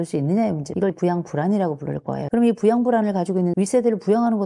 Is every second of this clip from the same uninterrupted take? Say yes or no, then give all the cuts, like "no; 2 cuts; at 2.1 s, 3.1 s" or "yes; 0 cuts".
no; 1 cut; at 3.5 s